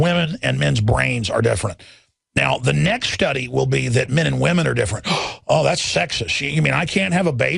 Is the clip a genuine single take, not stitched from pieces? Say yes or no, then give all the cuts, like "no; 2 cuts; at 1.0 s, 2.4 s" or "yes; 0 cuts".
no; 1 cut; at 6.4 s